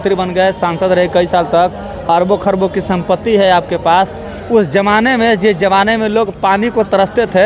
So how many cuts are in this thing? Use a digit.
0